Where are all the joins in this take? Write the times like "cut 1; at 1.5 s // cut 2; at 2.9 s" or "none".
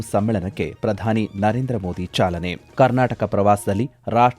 cut 1; at 2.6 s